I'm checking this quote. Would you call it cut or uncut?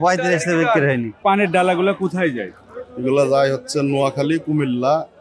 cut